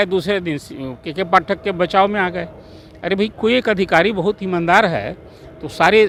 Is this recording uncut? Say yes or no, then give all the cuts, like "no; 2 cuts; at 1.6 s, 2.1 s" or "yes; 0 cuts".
yes; 0 cuts